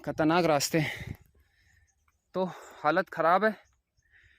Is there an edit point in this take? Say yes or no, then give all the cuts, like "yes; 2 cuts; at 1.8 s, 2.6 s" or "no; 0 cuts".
no; 0 cuts